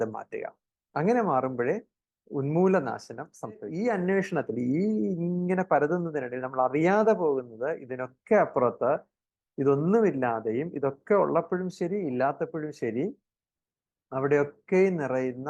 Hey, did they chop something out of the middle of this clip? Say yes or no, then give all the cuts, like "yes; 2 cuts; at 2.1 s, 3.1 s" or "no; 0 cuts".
yes; 1 cut; at 3.7 s